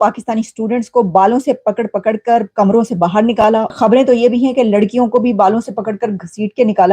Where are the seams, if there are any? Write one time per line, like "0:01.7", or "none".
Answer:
0:03.7